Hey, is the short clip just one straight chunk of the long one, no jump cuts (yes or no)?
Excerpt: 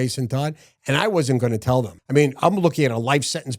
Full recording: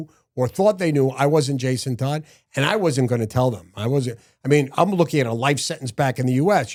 no